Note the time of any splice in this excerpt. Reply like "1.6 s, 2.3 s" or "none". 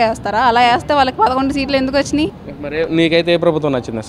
2.5 s